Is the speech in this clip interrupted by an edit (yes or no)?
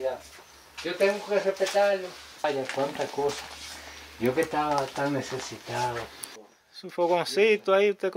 yes